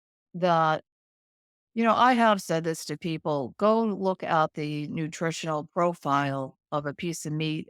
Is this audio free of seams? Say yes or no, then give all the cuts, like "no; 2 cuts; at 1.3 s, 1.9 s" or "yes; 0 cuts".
yes; 0 cuts